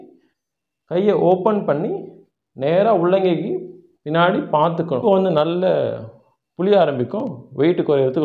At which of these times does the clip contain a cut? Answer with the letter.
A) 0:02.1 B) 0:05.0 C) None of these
B